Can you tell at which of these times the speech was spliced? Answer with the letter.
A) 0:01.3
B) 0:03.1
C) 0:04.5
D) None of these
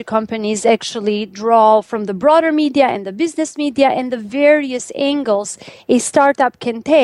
D